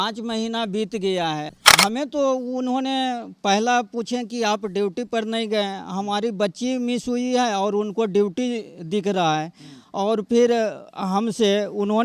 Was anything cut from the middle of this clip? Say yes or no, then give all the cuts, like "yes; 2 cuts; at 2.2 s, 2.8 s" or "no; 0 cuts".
yes; 1 cut; at 1.5 s